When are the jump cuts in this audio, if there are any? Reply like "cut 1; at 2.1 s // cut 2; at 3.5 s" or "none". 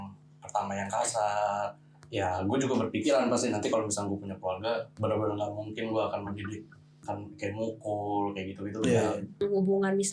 cut 1; at 1.9 s // cut 2; at 4.9 s // cut 3; at 7.0 s // cut 4; at 9.4 s

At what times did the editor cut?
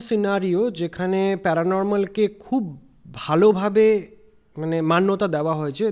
none

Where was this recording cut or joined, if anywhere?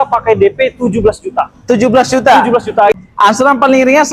cut 1; at 3.0 s

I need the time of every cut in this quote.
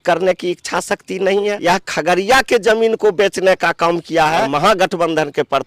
cut 1; at 1.6 s // cut 2; at 4.5 s

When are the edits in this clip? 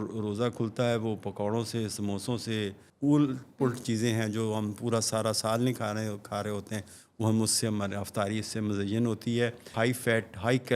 cut 1; at 2.8 s // cut 2; at 9.7 s

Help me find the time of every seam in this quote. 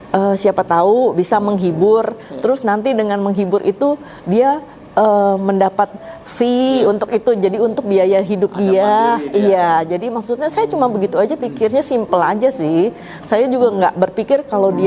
none

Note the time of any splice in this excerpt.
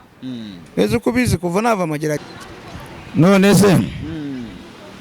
cut 1; at 2.2 s

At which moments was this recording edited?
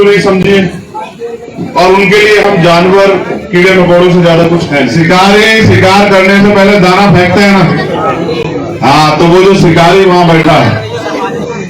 cut 1; at 4.9 s

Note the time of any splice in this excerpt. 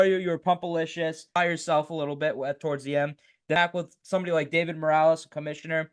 cut 1; at 1.3 s // cut 2; at 3.6 s

